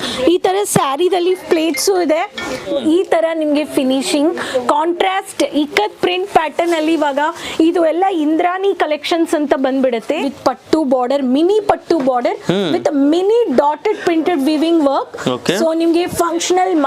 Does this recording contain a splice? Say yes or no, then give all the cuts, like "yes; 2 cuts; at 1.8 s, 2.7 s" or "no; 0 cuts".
yes; 2 cuts; at 2.6 s, 10.2 s